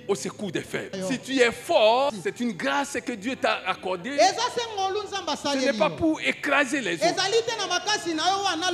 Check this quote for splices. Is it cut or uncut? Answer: cut